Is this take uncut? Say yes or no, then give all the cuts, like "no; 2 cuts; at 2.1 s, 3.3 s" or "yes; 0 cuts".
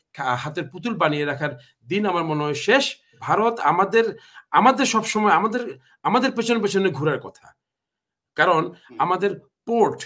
no; 1 cut; at 3.1 s